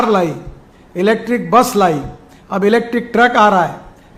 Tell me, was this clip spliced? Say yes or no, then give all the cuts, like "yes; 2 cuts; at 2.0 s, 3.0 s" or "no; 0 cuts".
no; 0 cuts